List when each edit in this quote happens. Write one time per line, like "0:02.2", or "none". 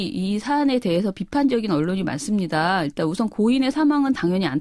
none